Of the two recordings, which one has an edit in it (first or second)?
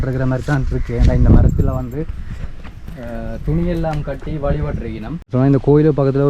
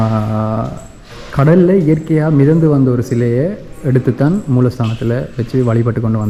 first